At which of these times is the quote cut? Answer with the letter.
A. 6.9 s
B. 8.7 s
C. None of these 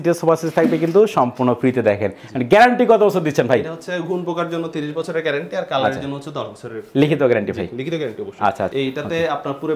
B